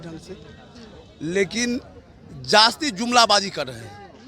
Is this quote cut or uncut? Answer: uncut